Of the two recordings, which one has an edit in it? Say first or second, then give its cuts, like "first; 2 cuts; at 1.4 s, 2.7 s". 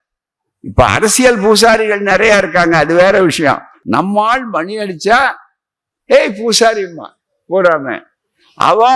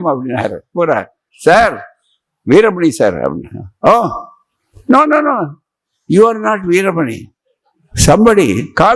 first; 1 cut; at 3.7 s